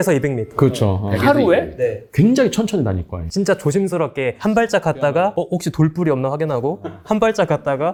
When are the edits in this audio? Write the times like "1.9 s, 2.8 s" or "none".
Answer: none